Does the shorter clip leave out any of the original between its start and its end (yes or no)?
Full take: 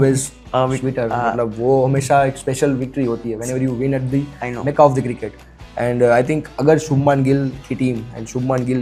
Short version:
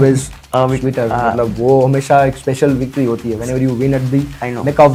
no